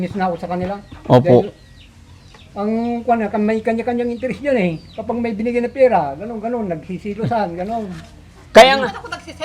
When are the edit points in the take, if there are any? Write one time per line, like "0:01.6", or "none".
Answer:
none